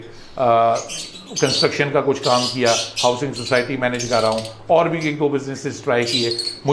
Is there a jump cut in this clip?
no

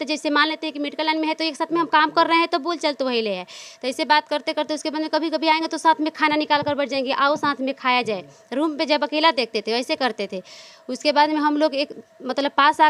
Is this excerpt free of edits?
yes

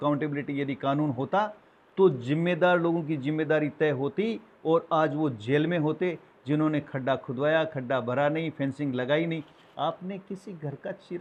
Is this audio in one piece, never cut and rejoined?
yes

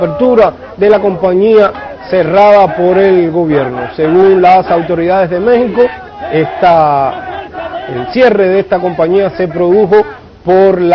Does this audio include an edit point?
yes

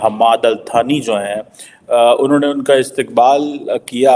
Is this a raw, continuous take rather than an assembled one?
yes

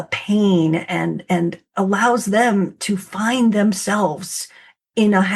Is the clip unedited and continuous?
yes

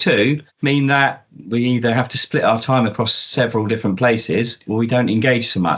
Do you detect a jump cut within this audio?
yes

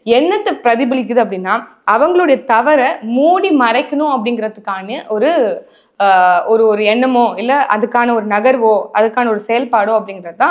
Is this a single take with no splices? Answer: yes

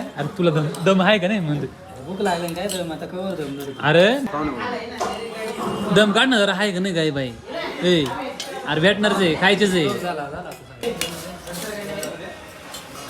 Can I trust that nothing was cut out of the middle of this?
no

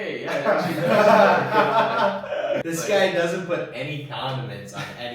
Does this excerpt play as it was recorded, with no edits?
no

